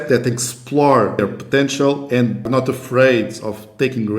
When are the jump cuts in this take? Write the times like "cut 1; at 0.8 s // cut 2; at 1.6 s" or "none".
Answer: cut 1; at 1.2 s // cut 2; at 2.4 s